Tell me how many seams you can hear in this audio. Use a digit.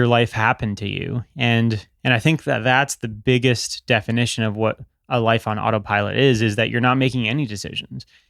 1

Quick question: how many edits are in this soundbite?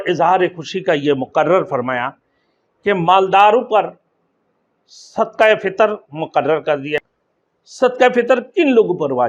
1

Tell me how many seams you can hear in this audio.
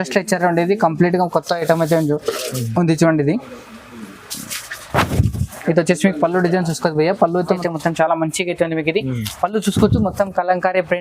1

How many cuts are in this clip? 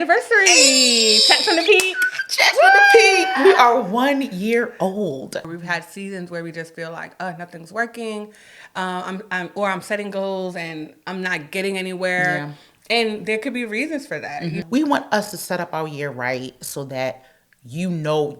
2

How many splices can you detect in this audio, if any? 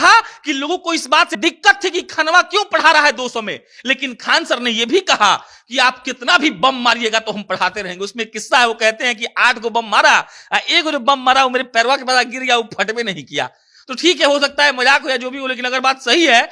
1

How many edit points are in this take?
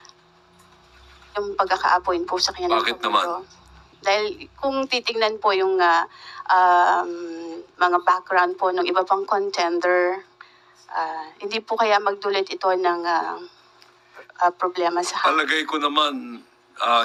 0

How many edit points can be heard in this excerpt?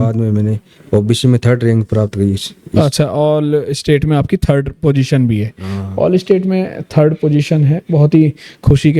0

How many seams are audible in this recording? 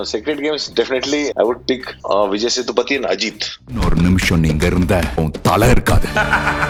0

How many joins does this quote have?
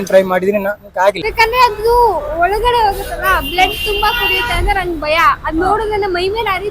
1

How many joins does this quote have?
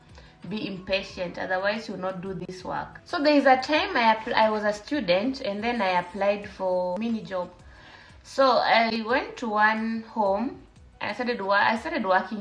1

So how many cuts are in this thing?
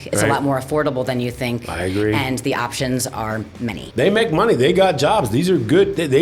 1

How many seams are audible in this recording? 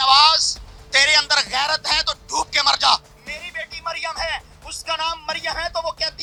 0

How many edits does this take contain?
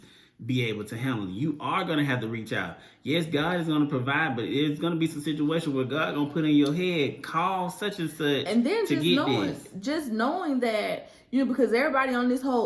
0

